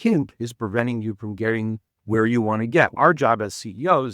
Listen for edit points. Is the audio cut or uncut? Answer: cut